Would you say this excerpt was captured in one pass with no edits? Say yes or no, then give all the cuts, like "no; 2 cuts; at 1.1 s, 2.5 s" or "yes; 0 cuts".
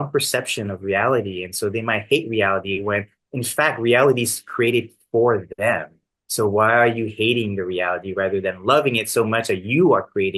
yes; 0 cuts